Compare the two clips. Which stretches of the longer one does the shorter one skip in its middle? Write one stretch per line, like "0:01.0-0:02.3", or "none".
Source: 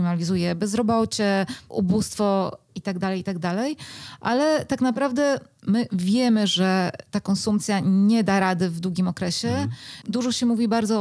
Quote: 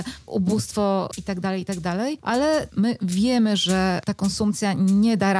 0:02.6-0:02.7
0:04.2-0:05.5
0:07.0-0:07.1